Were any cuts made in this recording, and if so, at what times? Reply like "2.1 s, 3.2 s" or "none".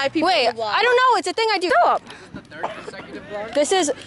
1.7 s